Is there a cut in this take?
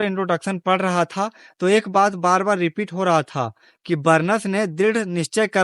no; 0 cuts

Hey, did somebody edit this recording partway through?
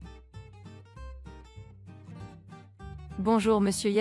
yes; 1 cut; at 2.9 s

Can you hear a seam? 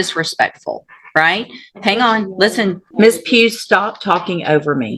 yes; 1 cut; at 2.8 s

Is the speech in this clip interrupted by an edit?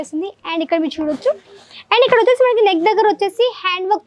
no; 0 cuts

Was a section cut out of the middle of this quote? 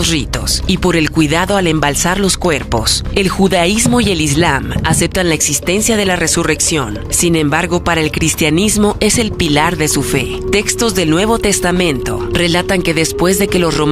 no; 0 cuts

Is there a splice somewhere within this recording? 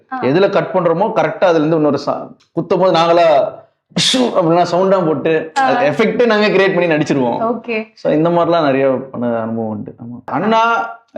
yes; 2 cuts; at 2.3 s, 10.3 s

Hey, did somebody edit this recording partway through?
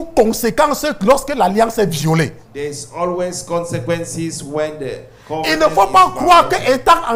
no; 0 cuts

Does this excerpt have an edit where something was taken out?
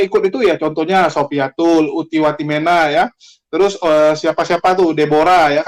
no; 0 cuts

